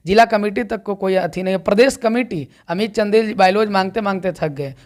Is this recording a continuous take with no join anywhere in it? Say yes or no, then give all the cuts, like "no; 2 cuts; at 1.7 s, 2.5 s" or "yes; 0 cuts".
yes; 0 cuts